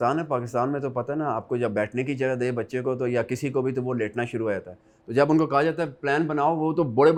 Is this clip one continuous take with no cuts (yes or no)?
yes